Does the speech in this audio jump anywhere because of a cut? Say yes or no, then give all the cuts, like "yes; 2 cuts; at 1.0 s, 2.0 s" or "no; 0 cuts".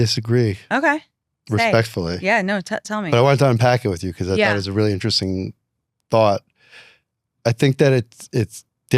no; 0 cuts